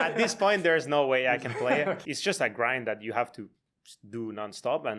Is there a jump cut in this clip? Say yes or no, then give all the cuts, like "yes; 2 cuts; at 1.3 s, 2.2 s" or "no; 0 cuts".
yes; 1 cut; at 2.0 s